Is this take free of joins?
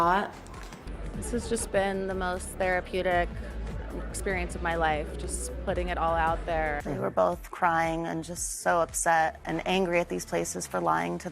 no; 2 cuts; at 0.9 s, 6.8 s

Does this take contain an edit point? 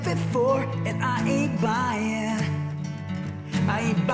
no; 0 cuts

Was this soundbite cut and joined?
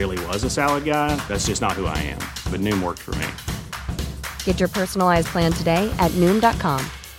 no; 0 cuts

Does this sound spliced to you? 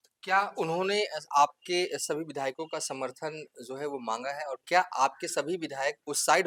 no; 0 cuts

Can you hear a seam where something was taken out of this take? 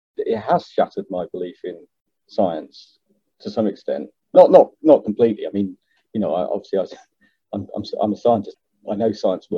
yes; 1 cut; at 8.5 s

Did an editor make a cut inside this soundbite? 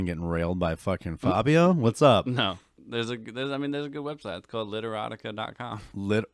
yes; 1 cut; at 2.7 s

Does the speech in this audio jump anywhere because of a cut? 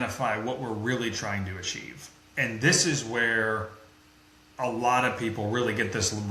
no; 0 cuts

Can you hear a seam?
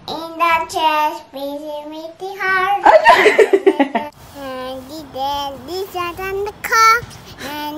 yes; 1 cut; at 3.8 s

